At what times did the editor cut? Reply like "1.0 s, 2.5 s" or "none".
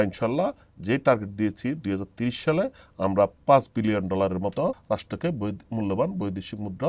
4.8 s